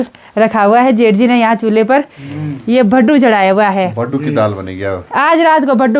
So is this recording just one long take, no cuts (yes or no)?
yes